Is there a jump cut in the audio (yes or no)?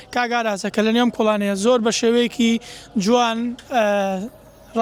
no